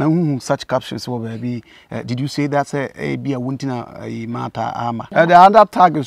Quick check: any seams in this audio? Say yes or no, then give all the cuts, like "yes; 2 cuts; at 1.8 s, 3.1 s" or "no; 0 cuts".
yes; 1 cut; at 5.1 s